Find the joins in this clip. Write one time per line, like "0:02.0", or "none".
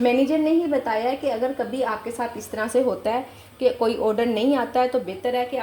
none

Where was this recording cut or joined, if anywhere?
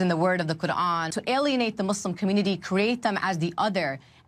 0:01.1

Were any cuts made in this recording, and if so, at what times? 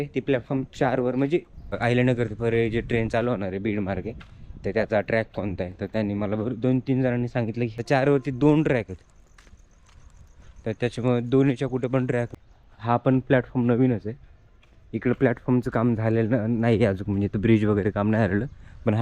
0:01.8
0:07.8
0:12.3

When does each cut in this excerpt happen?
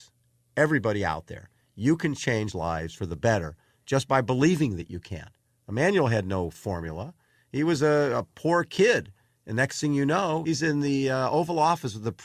0:10.4

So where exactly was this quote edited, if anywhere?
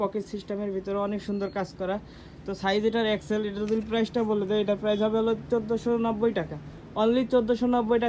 none

